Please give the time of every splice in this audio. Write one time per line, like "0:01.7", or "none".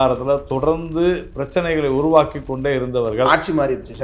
none